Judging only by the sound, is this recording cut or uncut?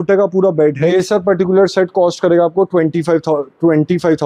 cut